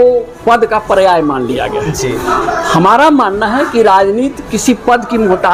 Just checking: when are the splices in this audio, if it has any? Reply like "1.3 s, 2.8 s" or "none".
none